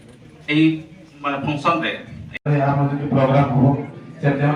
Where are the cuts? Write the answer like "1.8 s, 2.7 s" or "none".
2.4 s